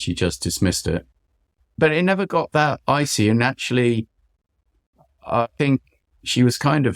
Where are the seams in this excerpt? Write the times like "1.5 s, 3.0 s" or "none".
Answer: 1.5 s, 5.5 s